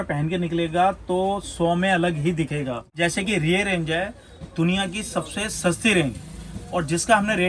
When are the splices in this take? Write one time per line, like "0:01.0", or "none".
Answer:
0:02.8

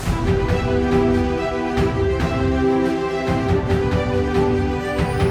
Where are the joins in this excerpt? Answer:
none

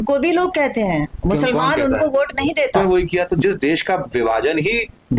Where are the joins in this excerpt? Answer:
0:02.7

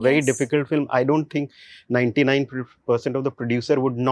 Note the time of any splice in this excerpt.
none

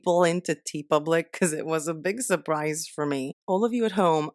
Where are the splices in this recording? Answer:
0:03.4

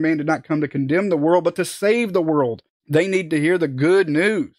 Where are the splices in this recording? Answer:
0:02.7

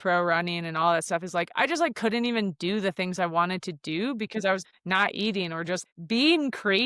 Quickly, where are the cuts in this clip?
0:04.6
0:05.8

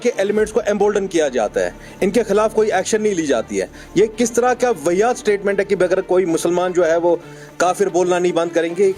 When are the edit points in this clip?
none

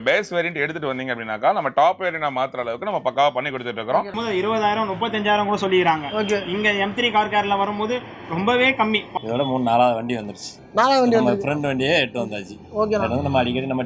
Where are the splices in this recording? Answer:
0:04.1
0:09.1

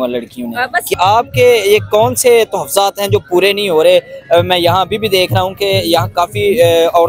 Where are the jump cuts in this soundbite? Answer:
0:00.9

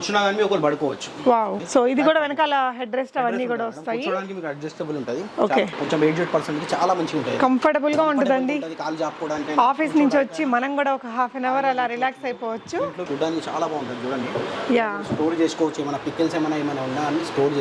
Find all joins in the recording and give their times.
0:01.6
0:05.7
0:13.0

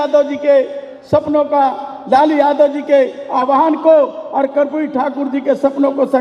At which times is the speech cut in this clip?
none

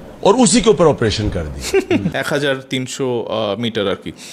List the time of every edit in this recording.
0:02.2

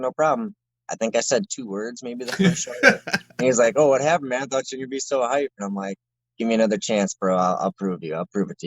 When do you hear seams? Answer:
0:03.3

